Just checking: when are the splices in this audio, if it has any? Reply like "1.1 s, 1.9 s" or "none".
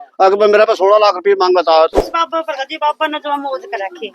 2.0 s